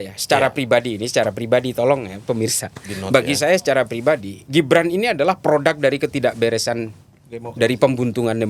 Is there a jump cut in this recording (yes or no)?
no